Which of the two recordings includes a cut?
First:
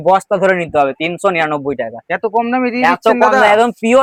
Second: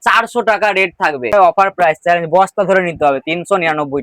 second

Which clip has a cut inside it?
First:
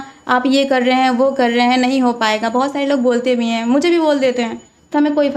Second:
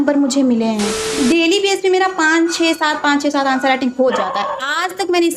second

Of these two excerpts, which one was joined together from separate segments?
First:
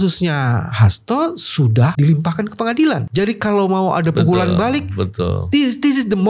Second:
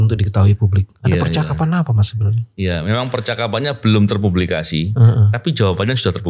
first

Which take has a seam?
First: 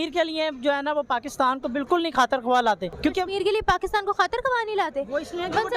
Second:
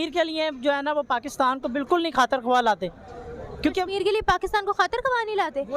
first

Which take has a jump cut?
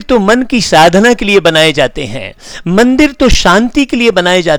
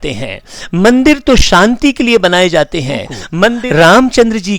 second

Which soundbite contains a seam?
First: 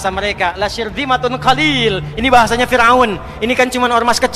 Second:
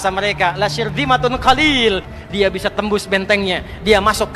second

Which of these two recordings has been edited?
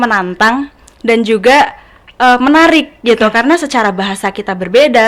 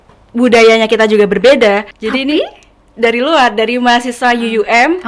second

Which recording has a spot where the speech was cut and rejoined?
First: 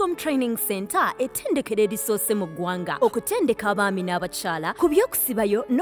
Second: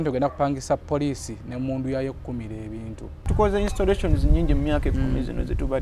second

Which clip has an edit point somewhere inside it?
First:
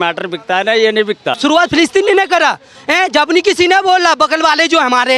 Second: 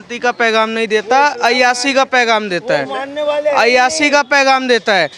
first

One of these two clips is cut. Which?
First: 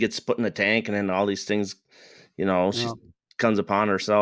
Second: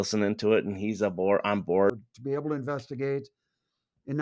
second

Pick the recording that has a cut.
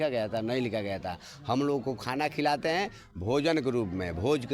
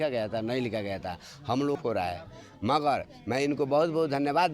second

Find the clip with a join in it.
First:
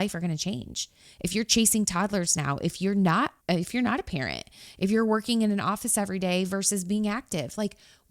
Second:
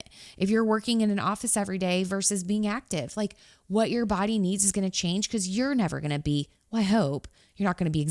first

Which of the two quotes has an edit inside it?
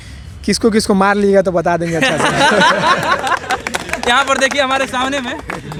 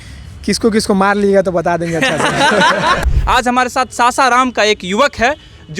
second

